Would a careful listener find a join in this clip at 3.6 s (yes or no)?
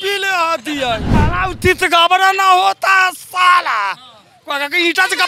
no